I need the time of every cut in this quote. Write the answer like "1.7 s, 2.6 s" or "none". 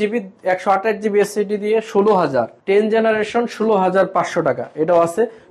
2.5 s